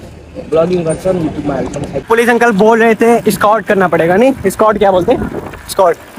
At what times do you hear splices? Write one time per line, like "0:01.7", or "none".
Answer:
0:02.1